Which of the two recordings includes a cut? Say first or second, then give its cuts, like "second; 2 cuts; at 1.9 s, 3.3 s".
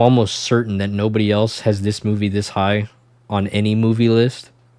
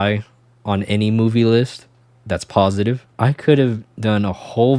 second; 1 cut; at 3.1 s